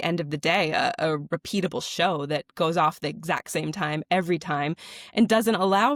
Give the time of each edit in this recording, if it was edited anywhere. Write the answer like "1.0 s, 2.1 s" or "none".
none